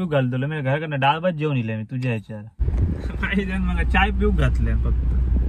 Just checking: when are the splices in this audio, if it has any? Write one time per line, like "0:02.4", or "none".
0:02.6